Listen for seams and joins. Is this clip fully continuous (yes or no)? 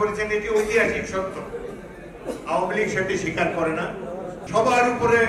no